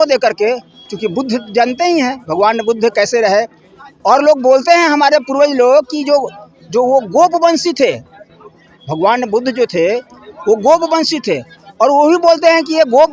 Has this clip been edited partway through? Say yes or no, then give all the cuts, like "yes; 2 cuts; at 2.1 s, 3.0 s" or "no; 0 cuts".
no; 0 cuts